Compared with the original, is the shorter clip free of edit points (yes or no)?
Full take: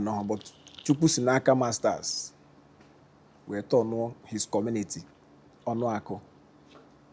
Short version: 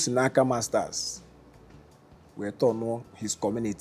yes